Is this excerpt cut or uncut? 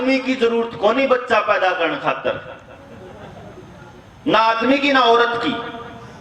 uncut